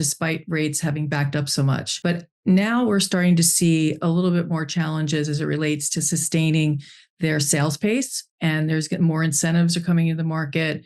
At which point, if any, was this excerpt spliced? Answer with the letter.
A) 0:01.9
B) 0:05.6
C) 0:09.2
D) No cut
A